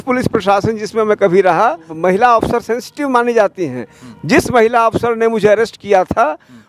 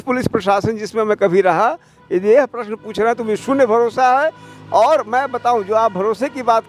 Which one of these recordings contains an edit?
first; 1 cut; at 1.9 s

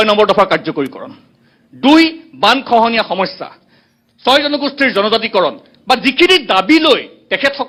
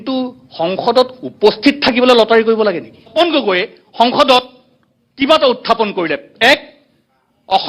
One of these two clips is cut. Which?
second; 1 cut; at 3.1 s

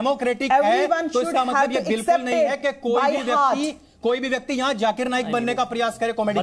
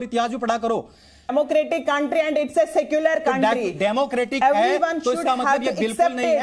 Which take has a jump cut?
second; 1 cut; at 1.3 s

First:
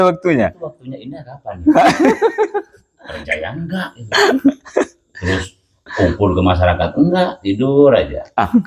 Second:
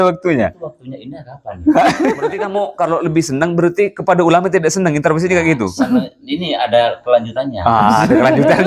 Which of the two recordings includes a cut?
second; 1 cut; at 2.5 s

